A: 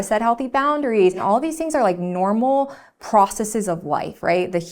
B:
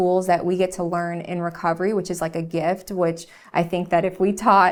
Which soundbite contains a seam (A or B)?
A